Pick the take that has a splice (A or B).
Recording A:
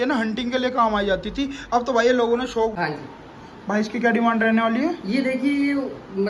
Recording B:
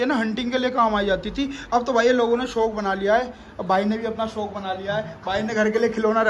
A